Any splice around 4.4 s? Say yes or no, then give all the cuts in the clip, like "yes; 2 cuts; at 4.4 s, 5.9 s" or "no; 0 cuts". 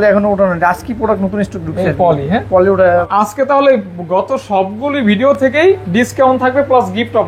no; 1 cut; at 3.1 s